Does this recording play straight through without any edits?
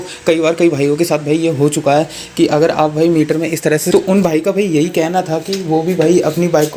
no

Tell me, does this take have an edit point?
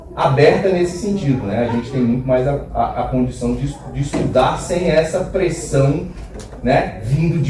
no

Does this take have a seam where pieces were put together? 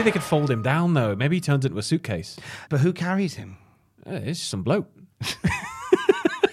yes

